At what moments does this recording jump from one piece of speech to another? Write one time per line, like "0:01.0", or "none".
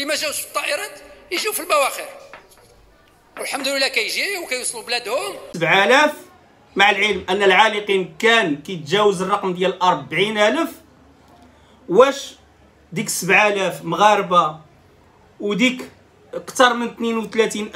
0:05.5